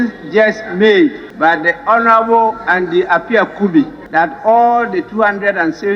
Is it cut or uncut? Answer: cut